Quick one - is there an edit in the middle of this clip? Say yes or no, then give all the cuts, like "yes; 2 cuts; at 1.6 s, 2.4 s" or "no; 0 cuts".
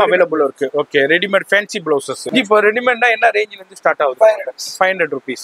yes; 1 cut; at 2.2 s